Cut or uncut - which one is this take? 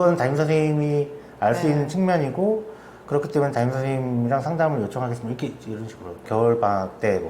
cut